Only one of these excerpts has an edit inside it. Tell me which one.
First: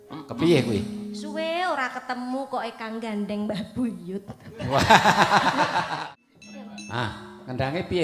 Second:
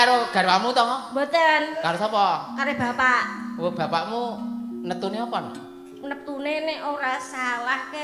first; 1 cut; at 6.0 s

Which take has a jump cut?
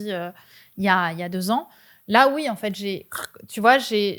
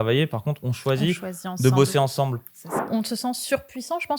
second; 1 cut; at 2.7 s

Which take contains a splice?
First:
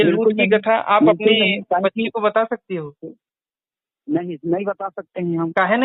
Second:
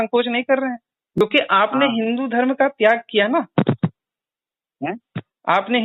second; 1 cut; at 1.2 s

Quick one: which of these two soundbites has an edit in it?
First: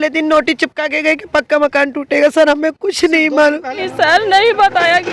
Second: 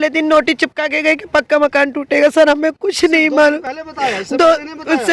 first; 1 cut; at 3.8 s

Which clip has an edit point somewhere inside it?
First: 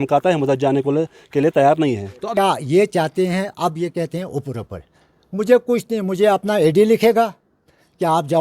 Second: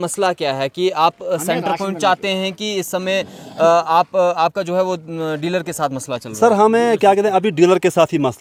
first; 1 cut; at 2.2 s

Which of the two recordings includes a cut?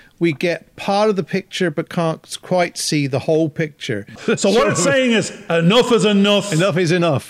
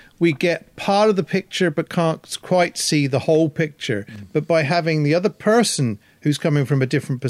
first; 1 cut; at 4.1 s

